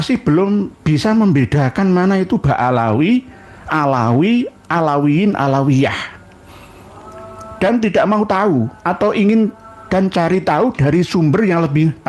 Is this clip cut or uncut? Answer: uncut